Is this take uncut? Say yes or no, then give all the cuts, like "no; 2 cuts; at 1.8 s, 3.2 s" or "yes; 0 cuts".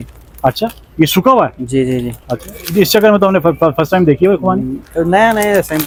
yes; 0 cuts